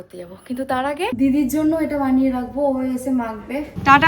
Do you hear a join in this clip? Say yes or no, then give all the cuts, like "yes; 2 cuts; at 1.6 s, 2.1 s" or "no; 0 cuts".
yes; 1 cut; at 1.1 s